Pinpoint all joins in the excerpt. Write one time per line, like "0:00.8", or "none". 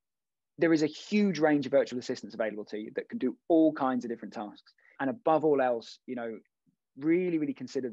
0:05.0